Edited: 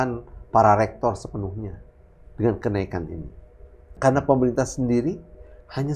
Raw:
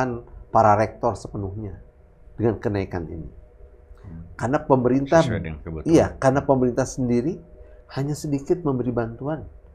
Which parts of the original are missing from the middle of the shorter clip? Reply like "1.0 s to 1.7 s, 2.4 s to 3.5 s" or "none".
3.9 s to 6.1 s